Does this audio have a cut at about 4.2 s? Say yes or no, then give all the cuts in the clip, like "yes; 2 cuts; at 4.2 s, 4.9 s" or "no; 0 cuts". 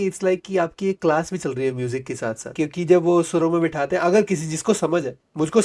no; 1 cut; at 2.5 s